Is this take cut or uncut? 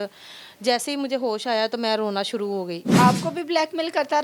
cut